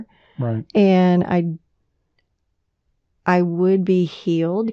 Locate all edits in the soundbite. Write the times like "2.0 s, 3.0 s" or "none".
none

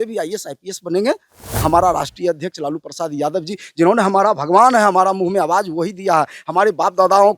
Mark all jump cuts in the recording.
1.6 s

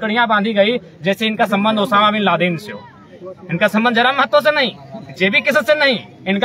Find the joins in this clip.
none

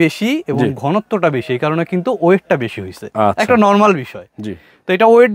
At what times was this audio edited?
none

